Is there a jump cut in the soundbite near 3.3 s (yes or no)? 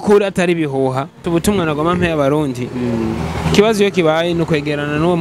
no